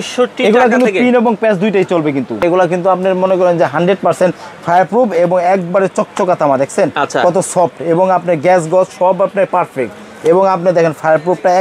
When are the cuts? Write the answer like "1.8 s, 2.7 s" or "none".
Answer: 2.4 s